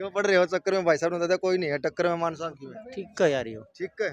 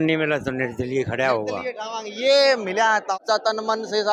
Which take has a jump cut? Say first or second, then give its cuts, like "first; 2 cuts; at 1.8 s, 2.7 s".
second; 1 cut; at 3.1 s